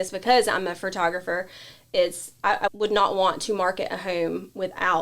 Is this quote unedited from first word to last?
no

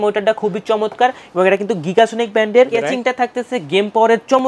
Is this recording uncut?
no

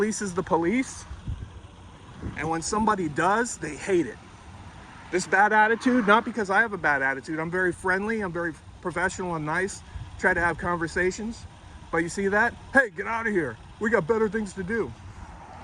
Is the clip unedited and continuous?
yes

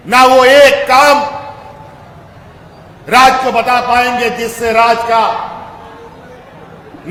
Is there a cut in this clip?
no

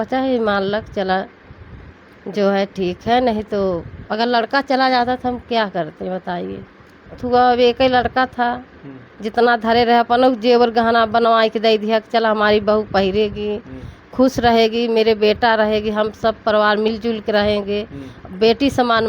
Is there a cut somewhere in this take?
yes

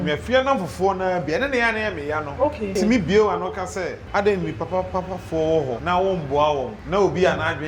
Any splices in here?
yes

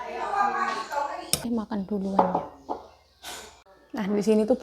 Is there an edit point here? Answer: yes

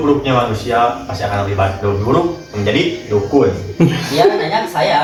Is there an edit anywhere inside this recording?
no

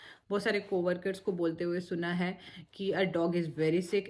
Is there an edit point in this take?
no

